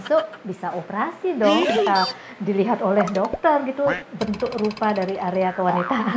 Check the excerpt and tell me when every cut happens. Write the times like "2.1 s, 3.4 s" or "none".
none